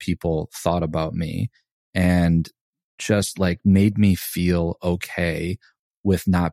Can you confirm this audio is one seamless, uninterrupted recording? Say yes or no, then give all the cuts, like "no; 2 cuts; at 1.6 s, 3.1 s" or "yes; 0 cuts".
no; 1 cut; at 2.8 s